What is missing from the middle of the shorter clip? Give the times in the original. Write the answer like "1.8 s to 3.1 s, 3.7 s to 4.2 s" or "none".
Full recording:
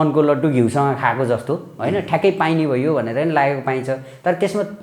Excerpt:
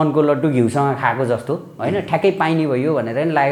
none